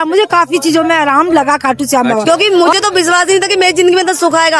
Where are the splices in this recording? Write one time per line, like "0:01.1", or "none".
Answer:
0:02.2